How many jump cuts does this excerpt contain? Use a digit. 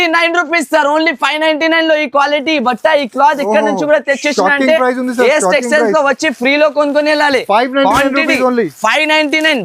0